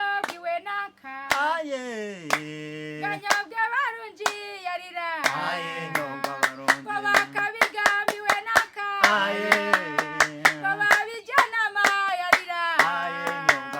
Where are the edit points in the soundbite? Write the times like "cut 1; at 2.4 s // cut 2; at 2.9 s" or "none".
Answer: none